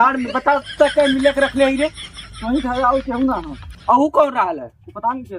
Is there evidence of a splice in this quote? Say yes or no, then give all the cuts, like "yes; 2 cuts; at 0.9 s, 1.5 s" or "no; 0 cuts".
no; 0 cuts